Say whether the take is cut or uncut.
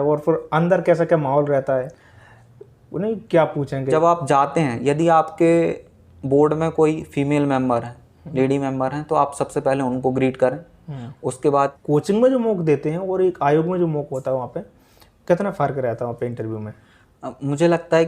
cut